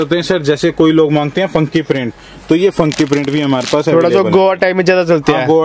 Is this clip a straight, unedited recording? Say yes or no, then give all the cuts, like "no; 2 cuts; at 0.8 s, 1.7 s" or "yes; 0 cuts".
yes; 0 cuts